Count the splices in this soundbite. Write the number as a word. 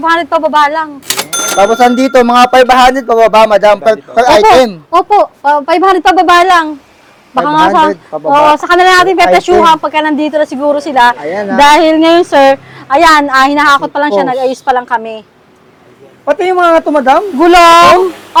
zero